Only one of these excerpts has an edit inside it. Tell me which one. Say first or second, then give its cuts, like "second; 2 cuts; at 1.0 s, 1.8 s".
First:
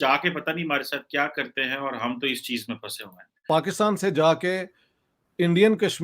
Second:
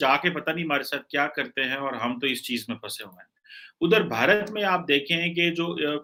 first; 1 cut; at 3.3 s